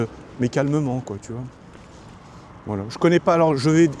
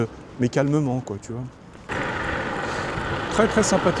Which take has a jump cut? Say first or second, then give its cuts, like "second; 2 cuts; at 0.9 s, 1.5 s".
second; 1 cut; at 1.9 s